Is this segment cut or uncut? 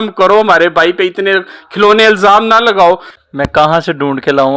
cut